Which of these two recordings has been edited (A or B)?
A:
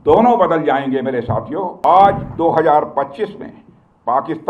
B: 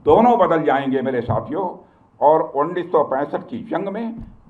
A